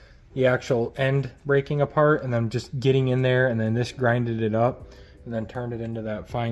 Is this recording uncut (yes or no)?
yes